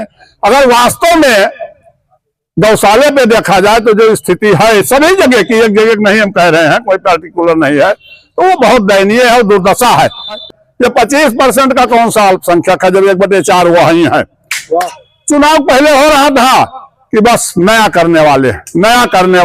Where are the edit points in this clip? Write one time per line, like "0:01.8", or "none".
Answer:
0:10.4
0:14.8